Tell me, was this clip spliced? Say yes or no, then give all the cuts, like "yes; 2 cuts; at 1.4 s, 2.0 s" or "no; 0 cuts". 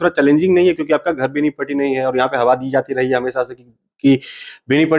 no; 0 cuts